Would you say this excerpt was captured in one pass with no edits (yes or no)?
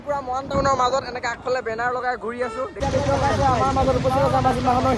no